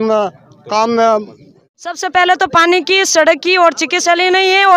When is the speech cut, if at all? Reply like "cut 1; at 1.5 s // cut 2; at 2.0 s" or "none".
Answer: cut 1; at 1.6 s